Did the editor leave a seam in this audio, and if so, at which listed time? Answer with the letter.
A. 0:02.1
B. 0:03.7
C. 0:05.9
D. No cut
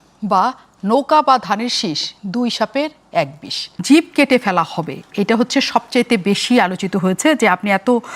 B